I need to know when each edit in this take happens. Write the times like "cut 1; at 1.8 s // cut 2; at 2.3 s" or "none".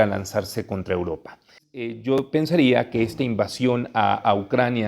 cut 1; at 1.6 s